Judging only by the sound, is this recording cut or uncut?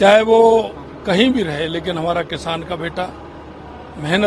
uncut